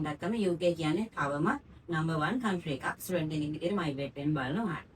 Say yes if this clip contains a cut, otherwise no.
no